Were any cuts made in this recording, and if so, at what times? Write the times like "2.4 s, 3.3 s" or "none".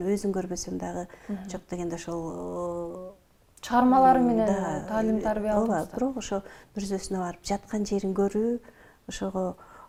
none

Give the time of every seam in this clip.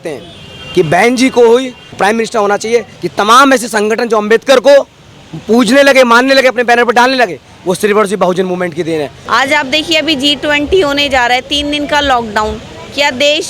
3.0 s, 9.2 s

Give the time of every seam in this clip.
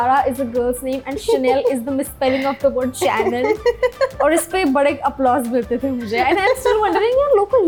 none

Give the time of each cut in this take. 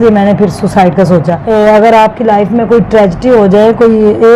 1.4 s

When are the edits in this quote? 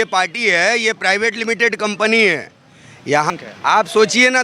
3.3 s

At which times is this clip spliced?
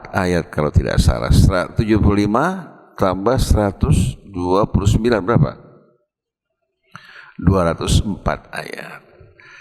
none

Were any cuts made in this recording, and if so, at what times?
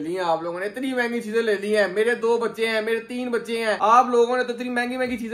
none

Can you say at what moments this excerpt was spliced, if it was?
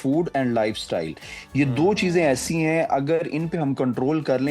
none

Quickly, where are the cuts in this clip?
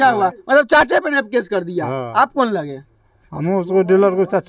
none

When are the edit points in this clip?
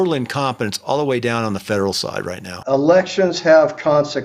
2.5 s

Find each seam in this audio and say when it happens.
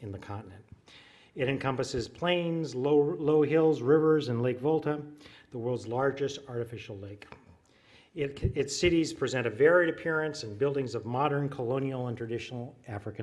9.1 s

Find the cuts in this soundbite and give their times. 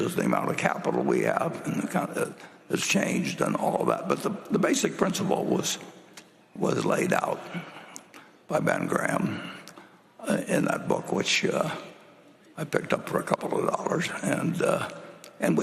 none

